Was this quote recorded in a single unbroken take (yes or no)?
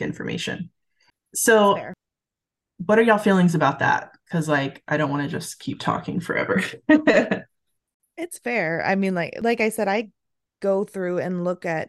yes